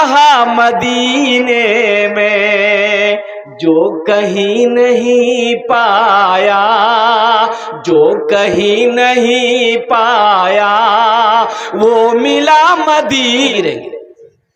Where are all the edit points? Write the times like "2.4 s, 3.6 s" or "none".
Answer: 13.5 s

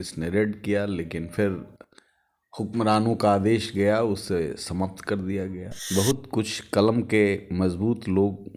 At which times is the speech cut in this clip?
5.7 s

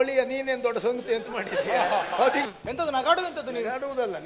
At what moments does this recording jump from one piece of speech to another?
2.4 s

